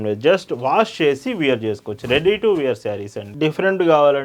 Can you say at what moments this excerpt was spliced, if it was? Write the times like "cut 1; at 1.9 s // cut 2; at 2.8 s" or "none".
cut 1; at 3.3 s

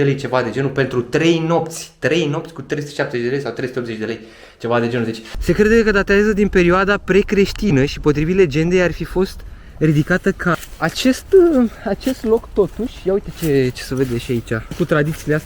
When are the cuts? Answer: cut 1; at 5.3 s // cut 2; at 10.5 s // cut 3; at 14.8 s

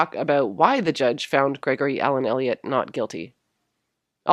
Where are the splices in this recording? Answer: cut 1; at 1.2 s

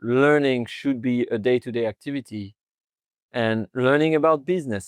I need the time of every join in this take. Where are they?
none

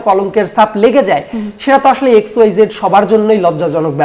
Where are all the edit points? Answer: none

